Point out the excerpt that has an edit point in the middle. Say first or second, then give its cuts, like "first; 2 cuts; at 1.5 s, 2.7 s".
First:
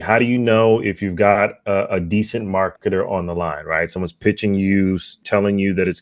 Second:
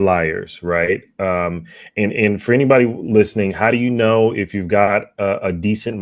first; 1 cut; at 5.1 s